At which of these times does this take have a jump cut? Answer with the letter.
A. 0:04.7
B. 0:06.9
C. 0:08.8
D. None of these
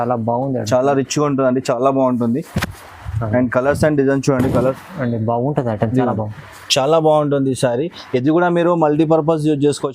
A